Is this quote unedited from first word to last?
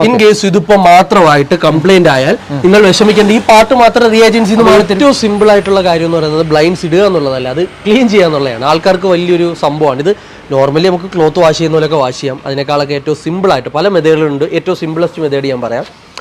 no; 1 cut; at 4.8 s

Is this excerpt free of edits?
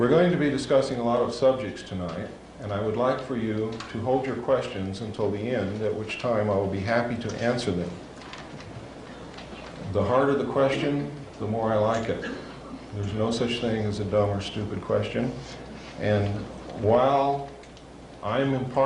no; 1 cut; at 17.4 s

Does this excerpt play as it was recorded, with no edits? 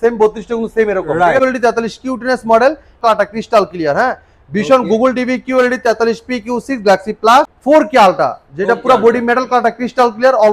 no; 3 cuts; at 1.4 s, 3.0 s, 7.5 s

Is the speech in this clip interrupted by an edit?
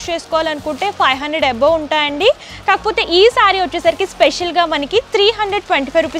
no; 0 cuts

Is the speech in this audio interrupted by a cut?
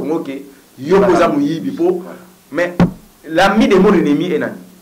no; 0 cuts

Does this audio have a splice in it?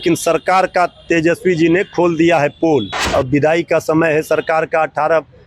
yes; 1 cut; at 3.0 s

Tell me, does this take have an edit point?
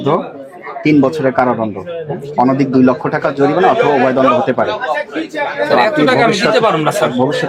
no; 0 cuts

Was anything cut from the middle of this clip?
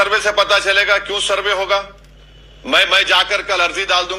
no; 0 cuts

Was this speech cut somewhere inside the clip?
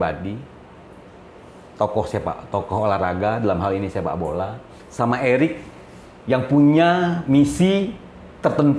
no; 0 cuts

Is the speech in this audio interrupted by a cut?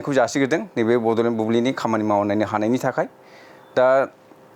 no; 0 cuts

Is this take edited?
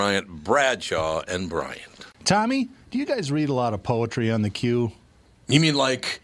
yes; 1 cut; at 2.1 s

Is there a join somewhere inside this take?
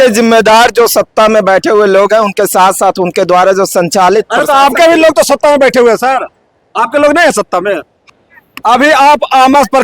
yes; 1 cut; at 8.0 s

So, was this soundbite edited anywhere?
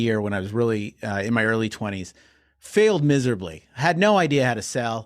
no; 0 cuts

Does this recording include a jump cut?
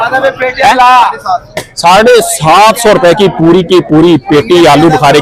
no; 0 cuts

